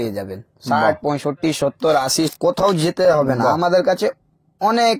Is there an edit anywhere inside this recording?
yes; 1 cut; at 2.3 s

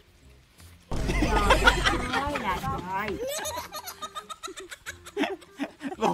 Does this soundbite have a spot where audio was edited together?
no; 0 cuts

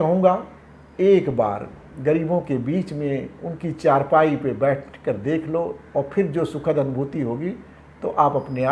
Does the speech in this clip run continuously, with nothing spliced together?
yes; 0 cuts

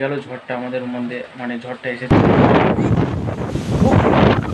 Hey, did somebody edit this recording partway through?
yes; 1 cut; at 2.1 s

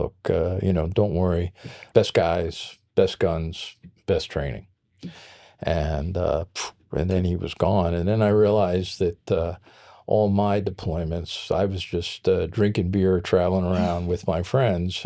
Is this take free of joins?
no; 1 cut; at 1.8 s

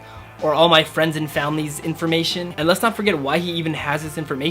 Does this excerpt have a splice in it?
yes; 1 cut; at 2.5 s

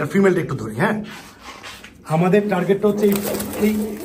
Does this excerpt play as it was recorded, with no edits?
yes; 0 cuts

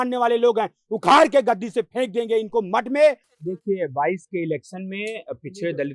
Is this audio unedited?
no; 1 cut; at 3.3 s

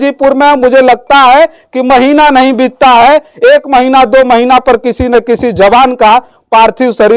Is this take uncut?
yes; 0 cuts

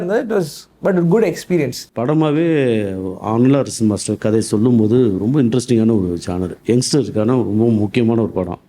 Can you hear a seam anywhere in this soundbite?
yes; 1 cut; at 1.8 s

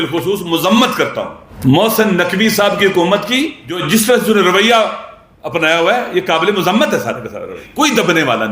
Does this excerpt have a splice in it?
yes; 3 cuts; at 1.4 s, 3.8 s, 7.6 s

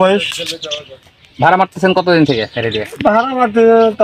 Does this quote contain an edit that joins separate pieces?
no; 0 cuts

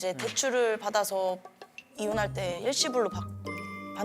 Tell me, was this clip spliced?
no; 0 cuts

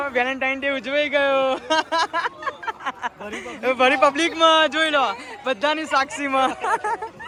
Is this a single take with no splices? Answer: yes; 0 cuts

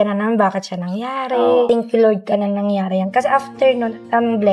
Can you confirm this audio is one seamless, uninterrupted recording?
no; 1 cut; at 1.7 s

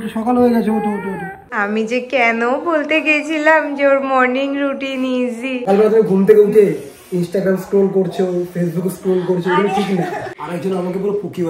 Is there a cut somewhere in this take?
yes; 3 cuts; at 1.6 s, 5.6 s, 10.3 s

